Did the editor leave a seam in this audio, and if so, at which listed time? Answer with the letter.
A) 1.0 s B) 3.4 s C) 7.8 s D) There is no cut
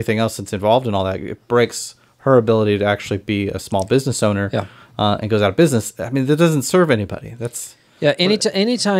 D